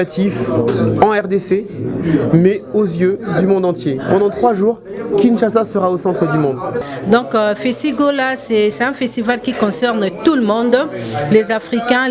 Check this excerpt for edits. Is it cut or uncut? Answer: cut